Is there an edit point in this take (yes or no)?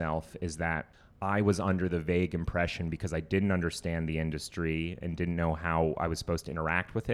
yes